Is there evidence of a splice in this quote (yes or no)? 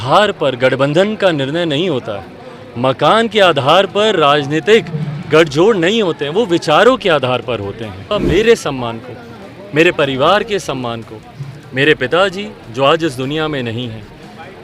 yes